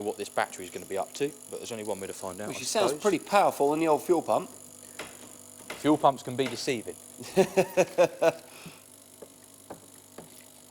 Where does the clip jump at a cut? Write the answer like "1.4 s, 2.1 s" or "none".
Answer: none